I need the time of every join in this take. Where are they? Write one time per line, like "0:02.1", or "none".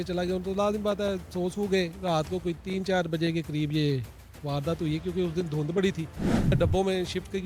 0:06.5